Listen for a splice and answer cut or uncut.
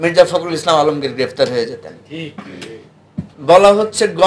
cut